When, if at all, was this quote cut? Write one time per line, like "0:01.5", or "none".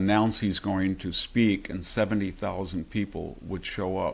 none